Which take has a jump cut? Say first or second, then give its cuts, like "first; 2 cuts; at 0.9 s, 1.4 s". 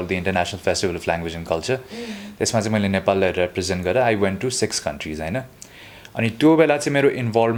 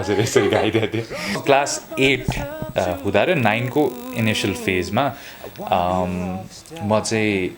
second; 1 cut; at 1.4 s